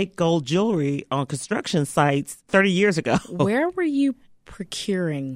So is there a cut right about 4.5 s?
no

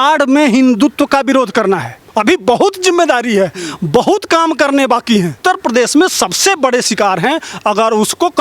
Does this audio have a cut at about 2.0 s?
yes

